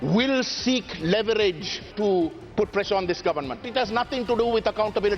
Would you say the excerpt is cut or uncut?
cut